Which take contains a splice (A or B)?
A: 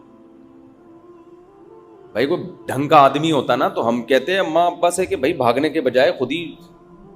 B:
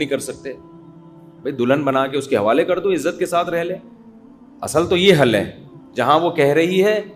A